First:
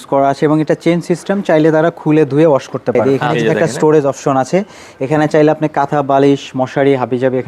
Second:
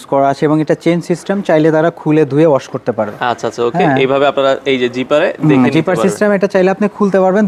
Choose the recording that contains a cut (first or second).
first